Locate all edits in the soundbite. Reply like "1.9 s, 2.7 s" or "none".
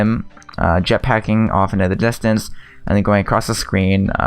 3.2 s